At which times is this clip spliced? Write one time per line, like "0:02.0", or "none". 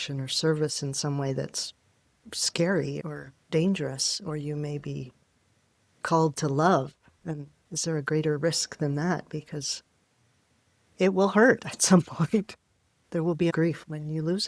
0:13.0